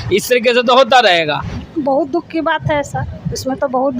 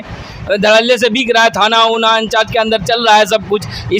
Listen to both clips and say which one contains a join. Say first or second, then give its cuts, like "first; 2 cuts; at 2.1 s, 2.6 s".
first; 1 cut; at 1.6 s